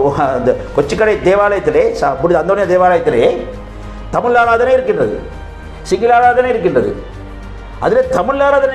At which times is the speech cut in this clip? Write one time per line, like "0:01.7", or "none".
none

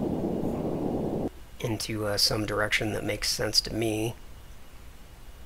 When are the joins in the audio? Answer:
0:01.1

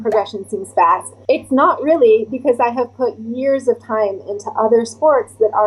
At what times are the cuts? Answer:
0:01.1

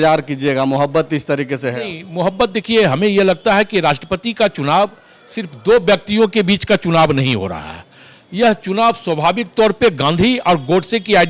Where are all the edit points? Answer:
none

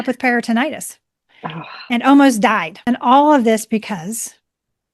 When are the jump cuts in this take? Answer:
0:02.7

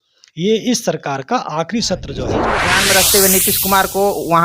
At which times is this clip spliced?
0:02.6

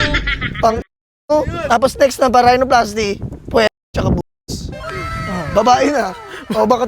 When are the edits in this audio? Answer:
0:01.6

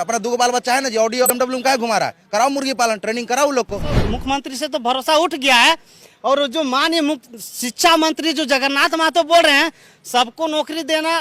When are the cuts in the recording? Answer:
0:01.3
0:04.0

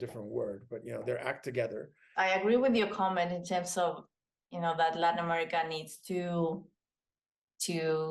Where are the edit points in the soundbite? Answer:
0:02.2

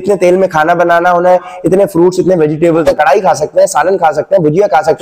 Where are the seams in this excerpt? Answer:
0:02.8

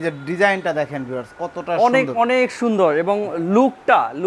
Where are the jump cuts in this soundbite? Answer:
none

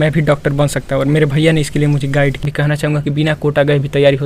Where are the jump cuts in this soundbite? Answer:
0:02.4

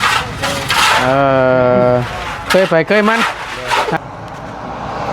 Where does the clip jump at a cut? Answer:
0:04.0

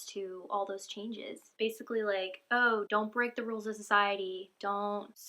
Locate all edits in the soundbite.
0:01.5
0:02.9

